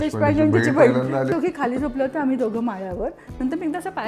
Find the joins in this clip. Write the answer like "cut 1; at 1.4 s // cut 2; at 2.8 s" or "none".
cut 1; at 1.3 s